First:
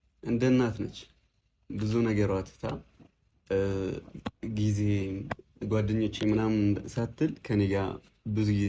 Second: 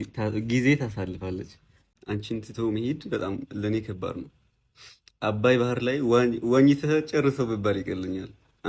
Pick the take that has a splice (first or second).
second